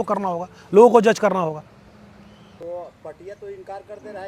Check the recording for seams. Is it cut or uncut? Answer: uncut